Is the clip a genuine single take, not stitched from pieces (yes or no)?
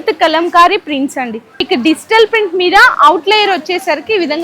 no